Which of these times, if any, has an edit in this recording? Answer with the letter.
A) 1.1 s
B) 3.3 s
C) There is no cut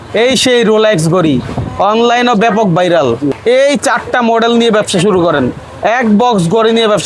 B